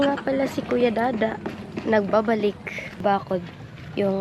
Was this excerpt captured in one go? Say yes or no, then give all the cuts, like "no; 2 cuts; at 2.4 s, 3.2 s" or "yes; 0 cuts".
no; 1 cut; at 3.0 s